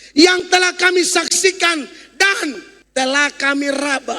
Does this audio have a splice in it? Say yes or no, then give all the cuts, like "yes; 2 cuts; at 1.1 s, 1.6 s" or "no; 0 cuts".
yes; 1 cut; at 2.7 s